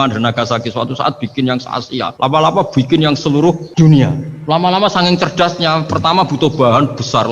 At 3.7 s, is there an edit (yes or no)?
yes